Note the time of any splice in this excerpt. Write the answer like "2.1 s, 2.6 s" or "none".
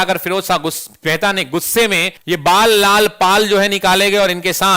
2.1 s